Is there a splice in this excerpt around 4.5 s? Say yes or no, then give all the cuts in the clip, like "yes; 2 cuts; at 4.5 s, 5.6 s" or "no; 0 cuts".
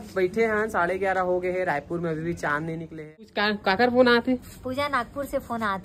no; 1 cut; at 3.2 s